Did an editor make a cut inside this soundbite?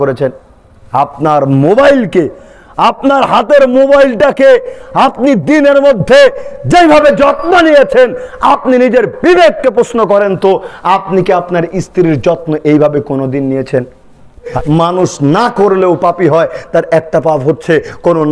yes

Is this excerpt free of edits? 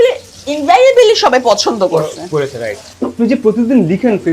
no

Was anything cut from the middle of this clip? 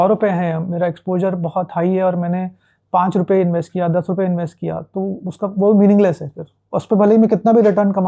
no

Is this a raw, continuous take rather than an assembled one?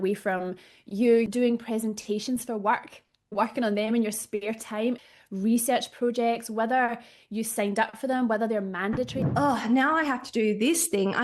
no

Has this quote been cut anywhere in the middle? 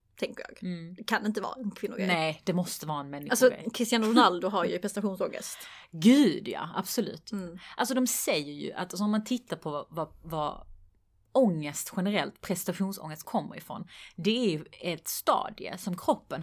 no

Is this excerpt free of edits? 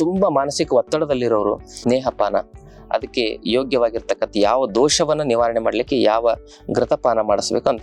no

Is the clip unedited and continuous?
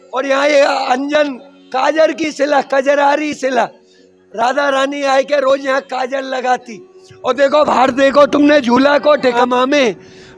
no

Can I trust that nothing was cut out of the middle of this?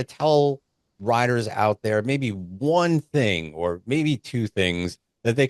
yes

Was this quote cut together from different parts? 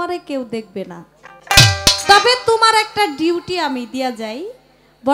no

